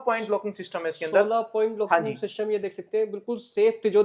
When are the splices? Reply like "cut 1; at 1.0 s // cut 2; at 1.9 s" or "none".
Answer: none